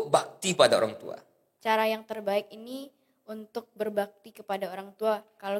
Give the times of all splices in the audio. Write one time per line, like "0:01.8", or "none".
0:01.5